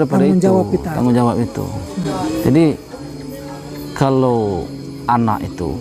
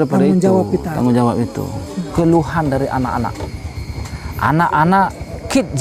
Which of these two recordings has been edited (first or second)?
second